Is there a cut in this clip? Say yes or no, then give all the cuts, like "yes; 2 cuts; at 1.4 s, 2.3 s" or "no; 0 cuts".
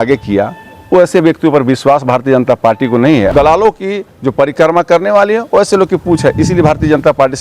yes; 1 cut; at 3.3 s